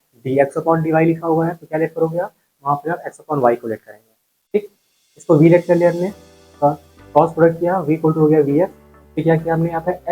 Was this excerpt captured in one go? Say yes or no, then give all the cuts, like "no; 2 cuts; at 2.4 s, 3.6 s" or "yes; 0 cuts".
yes; 0 cuts